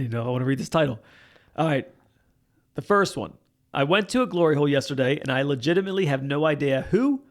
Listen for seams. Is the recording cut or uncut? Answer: cut